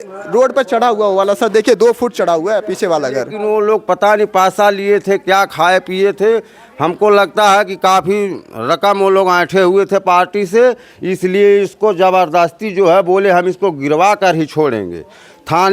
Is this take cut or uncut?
cut